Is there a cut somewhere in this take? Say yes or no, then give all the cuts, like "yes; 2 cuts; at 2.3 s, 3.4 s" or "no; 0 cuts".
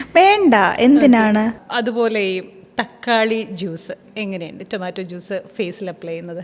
no; 0 cuts